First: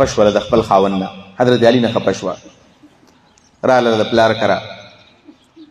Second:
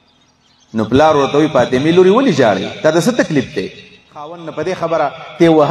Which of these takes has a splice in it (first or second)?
second